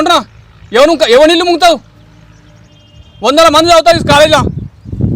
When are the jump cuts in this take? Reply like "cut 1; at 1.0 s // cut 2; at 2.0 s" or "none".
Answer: none